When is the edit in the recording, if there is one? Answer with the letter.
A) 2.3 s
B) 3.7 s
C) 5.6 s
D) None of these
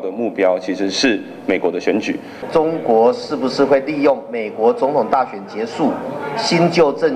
A